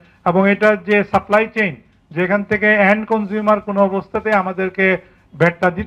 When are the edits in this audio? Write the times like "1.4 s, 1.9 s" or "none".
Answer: none